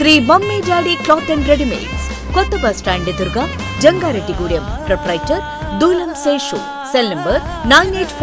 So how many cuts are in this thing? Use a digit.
0